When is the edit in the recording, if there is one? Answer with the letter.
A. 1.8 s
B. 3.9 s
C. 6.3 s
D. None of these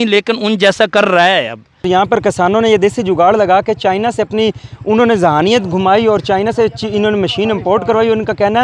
A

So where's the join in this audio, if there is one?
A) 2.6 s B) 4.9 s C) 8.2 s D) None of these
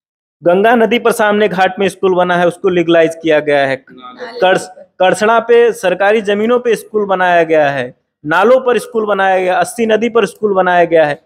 D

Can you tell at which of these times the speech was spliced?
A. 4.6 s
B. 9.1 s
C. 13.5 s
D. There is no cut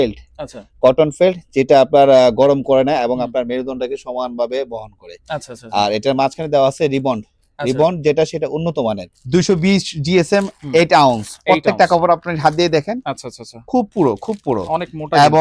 B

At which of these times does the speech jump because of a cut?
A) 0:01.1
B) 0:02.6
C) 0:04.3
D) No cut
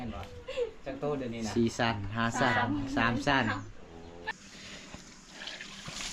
C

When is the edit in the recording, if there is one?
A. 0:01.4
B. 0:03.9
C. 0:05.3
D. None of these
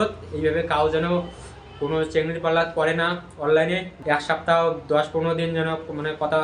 B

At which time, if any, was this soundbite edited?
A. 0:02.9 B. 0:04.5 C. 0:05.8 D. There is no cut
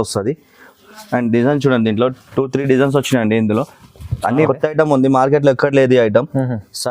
B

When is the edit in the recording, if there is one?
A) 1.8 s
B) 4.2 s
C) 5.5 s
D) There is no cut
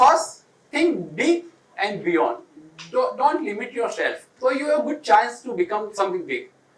B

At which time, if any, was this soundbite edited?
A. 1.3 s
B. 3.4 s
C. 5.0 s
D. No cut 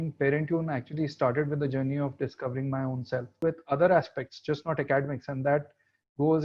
B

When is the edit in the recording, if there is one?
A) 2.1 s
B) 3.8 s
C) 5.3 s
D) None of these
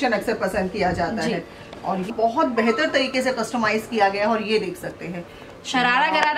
A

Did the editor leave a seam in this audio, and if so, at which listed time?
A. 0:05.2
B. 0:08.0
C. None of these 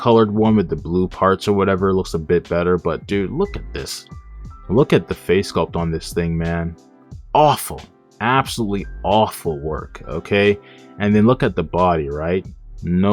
C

